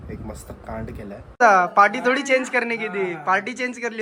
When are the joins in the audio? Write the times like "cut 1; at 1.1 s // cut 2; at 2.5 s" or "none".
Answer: cut 1; at 1.4 s